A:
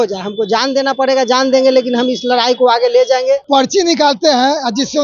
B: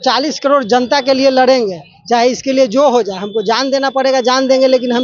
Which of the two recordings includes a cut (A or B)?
A